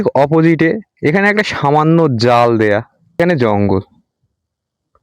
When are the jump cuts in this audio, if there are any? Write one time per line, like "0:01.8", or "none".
0:03.2